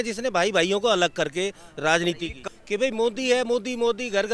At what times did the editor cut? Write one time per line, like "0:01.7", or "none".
0:02.4